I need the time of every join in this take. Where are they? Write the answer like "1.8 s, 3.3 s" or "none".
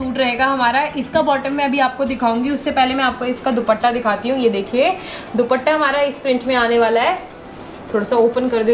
none

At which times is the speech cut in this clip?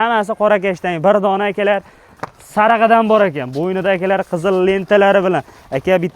none

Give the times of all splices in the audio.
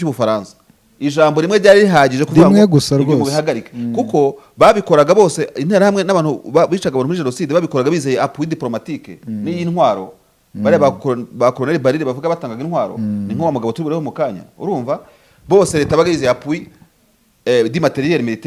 none

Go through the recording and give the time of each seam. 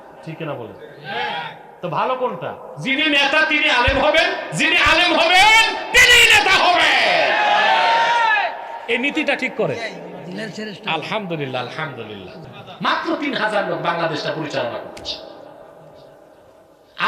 12.4 s

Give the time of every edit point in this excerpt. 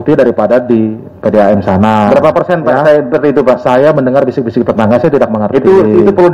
none

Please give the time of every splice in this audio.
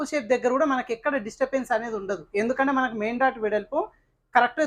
none

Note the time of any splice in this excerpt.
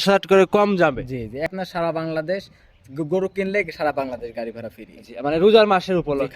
1.5 s

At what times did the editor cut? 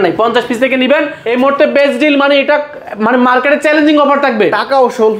1.2 s

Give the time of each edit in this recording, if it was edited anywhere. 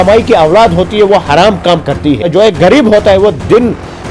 2.2 s

